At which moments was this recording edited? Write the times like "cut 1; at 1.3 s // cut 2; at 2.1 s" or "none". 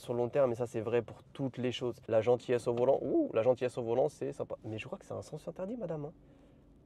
cut 1; at 2.0 s